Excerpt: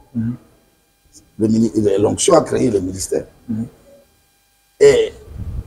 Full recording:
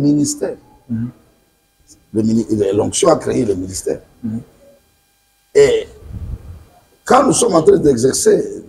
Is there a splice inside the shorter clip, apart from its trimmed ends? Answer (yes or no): no